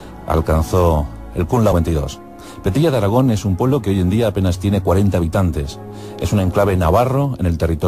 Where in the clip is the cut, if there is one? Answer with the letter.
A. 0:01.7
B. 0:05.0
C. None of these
C